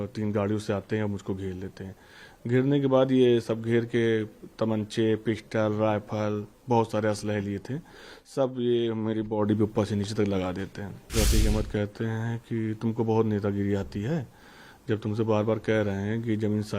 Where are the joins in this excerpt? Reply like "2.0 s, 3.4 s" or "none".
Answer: 11.1 s